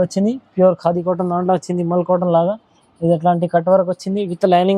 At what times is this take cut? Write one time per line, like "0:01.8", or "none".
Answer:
none